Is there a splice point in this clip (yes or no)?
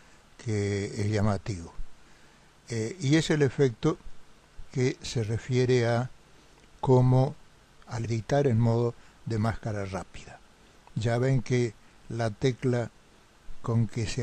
no